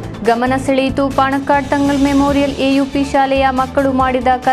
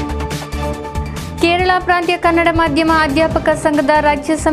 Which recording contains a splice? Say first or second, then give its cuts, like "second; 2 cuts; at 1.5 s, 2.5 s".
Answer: second; 1 cut; at 0.9 s